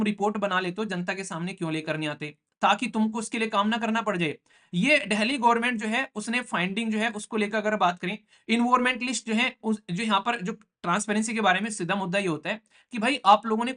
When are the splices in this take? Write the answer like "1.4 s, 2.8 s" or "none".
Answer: none